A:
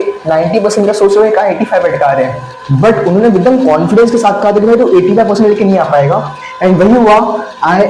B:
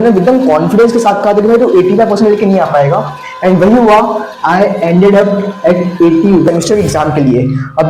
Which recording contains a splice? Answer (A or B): B